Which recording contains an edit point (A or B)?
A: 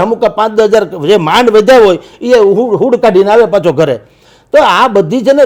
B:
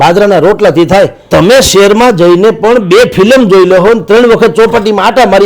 B